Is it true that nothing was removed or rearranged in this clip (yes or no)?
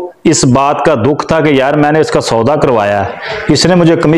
yes